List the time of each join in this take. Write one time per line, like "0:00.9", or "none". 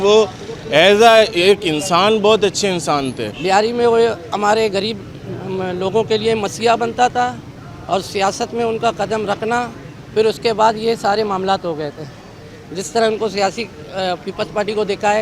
0:03.3

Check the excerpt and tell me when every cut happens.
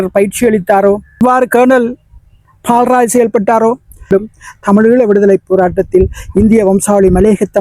0:01.2
0:04.1

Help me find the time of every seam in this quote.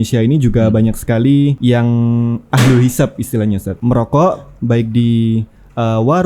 0:01.6
0:03.7

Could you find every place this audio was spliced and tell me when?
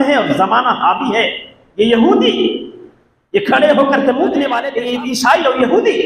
0:04.6

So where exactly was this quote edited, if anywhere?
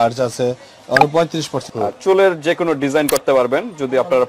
0:01.6

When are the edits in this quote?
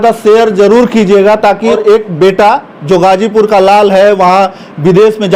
0:01.8

